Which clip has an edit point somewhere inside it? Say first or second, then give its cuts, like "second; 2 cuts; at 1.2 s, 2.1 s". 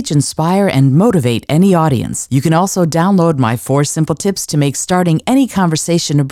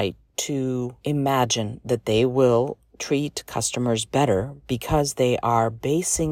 second; 1 cut; at 1.0 s